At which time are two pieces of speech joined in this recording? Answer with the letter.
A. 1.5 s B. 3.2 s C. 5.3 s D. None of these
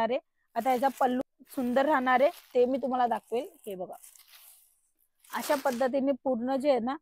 A